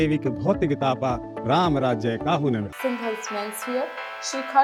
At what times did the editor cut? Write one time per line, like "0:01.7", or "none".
none